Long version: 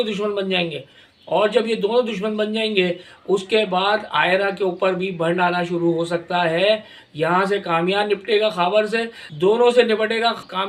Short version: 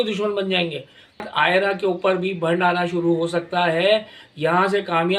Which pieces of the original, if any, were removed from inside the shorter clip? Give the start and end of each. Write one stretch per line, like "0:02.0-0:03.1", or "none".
0:01.2-0:04.0